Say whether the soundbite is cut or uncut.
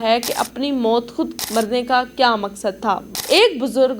cut